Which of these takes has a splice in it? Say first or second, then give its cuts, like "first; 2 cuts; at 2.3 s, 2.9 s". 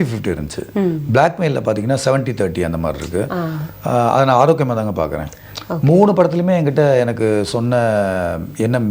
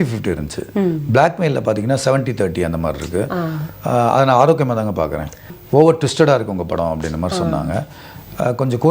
second; 1 cut; at 5.6 s